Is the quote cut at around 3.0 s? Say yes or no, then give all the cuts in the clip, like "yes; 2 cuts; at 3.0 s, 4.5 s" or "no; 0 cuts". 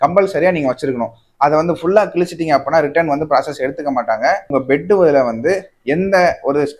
no; 1 cut; at 4.5 s